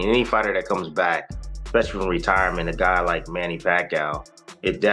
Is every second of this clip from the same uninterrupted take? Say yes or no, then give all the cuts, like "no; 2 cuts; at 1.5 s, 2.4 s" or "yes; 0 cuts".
yes; 0 cuts